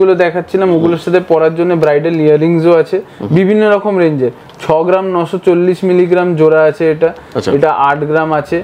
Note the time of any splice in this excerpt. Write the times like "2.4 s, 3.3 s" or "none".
none